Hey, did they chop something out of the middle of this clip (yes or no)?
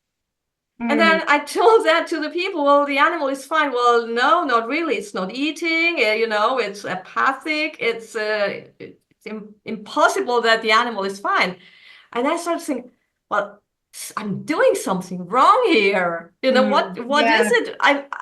no